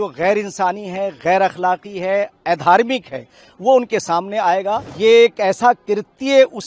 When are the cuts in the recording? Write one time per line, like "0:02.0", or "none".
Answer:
0:04.9